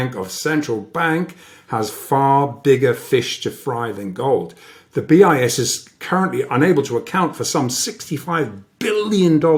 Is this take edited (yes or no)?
no